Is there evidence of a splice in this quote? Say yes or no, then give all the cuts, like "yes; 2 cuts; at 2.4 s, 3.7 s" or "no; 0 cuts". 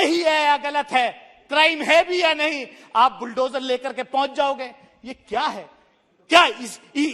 no; 0 cuts